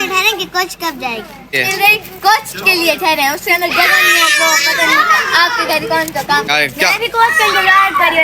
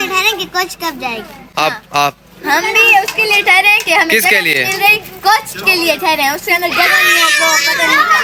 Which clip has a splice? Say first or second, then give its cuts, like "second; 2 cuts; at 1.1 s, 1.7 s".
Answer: first; 2 cuts; at 1.5 s, 6.5 s